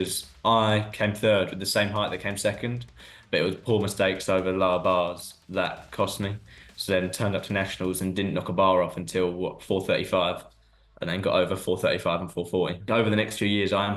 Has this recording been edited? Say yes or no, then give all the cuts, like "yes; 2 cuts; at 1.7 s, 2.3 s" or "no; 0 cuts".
yes; 1 cut; at 12.8 s